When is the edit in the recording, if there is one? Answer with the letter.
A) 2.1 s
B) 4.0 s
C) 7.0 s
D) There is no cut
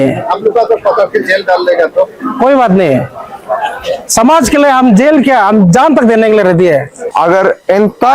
C